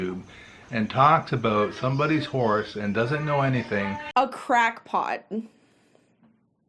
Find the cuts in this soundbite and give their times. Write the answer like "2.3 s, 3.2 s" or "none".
4.0 s